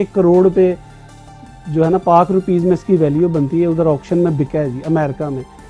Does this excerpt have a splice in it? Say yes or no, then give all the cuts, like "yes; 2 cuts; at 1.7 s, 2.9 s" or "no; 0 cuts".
no; 0 cuts